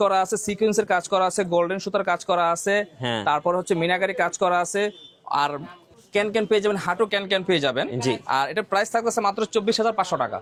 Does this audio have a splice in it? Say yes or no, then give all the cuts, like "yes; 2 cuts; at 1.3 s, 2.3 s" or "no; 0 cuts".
no; 0 cuts